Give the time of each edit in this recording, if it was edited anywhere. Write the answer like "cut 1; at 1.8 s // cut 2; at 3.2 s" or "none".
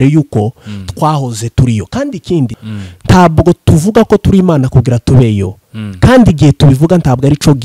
cut 1; at 2.6 s